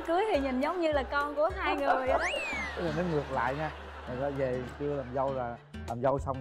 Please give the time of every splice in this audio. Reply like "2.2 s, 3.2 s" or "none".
2.6 s